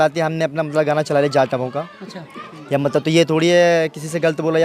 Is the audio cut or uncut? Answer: uncut